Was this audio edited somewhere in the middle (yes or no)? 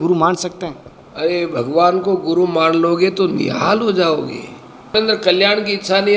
yes